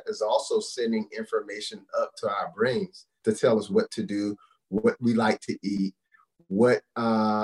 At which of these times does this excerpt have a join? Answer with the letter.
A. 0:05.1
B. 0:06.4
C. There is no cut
C